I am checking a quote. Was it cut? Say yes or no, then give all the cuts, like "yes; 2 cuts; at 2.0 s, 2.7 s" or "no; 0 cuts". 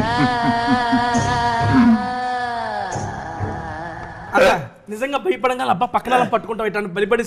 yes; 1 cut; at 4.2 s